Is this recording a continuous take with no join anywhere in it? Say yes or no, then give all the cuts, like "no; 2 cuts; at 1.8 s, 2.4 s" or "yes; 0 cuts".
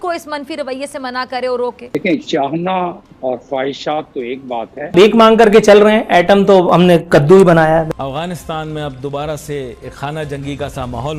no; 3 cuts; at 1.9 s, 4.9 s, 7.9 s